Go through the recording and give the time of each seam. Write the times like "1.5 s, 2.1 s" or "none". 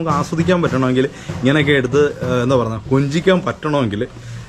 none